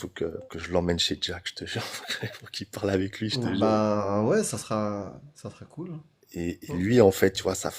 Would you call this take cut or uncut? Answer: uncut